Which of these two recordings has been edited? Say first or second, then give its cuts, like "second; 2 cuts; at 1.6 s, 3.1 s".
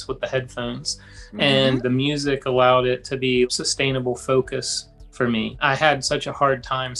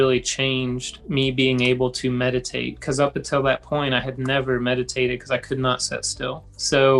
first; 3 cuts; at 1.8 s, 3.5 s, 5.6 s